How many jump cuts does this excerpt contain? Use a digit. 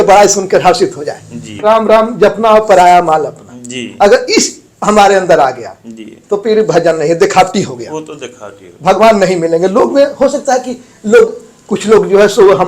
1